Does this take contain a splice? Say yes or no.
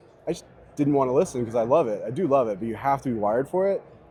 no